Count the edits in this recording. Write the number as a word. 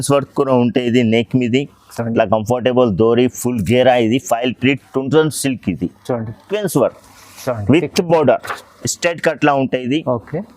one